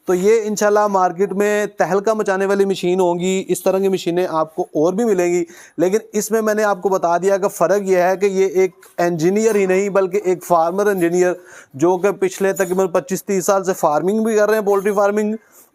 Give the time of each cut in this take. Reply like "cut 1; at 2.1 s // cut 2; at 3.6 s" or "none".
none